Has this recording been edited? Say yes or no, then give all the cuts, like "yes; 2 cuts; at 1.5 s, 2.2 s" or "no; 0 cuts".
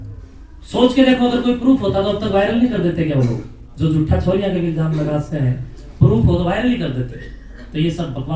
no; 0 cuts